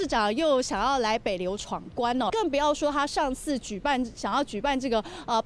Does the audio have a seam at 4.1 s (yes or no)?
no